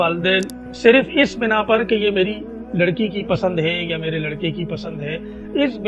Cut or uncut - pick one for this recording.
uncut